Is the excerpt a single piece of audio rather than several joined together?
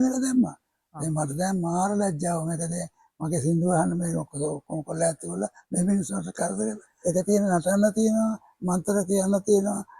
no; 1 cut; at 6.9 s

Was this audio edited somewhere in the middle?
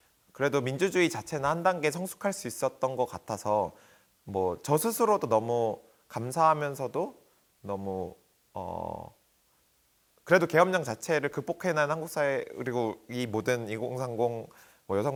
no; 0 cuts

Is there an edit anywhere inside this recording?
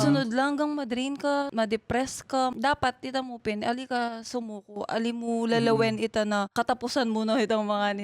yes; 3 cuts; at 1.5 s, 2.5 s, 6.5 s

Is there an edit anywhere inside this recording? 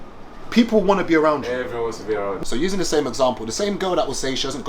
yes; 1 cut; at 2.4 s

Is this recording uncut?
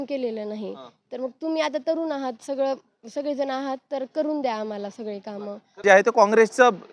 no; 1 cut; at 5.8 s

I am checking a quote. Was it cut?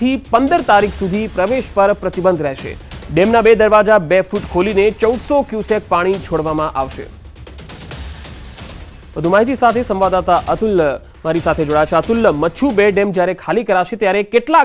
no; 0 cuts

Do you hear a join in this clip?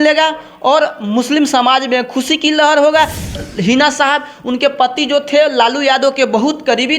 yes; 1 cut; at 3.3 s

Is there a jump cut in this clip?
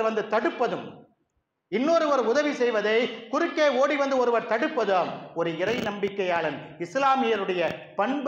no; 0 cuts

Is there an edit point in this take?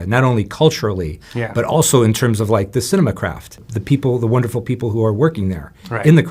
yes; 1 cut; at 3.7 s

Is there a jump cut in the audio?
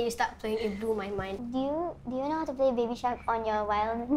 yes; 1 cut; at 1.4 s

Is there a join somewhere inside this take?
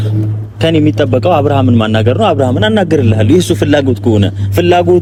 no; 0 cuts

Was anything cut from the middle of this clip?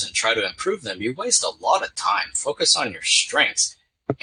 no; 0 cuts

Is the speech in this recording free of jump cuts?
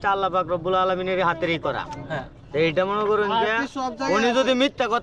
yes; 0 cuts

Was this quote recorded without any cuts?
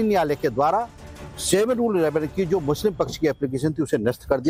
yes; 0 cuts

